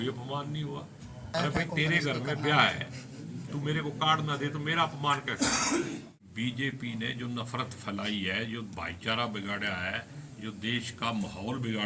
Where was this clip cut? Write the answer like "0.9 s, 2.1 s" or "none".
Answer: 1.3 s, 6.1 s